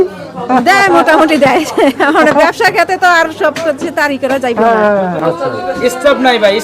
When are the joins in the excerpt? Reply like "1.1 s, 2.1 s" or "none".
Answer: 5.2 s